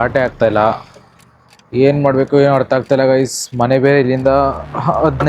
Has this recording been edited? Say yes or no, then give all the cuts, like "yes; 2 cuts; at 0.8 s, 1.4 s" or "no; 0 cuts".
yes; 1 cut; at 1.4 s